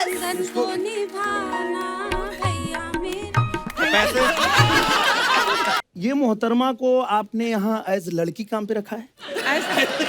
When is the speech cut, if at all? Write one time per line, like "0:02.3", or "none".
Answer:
0:05.8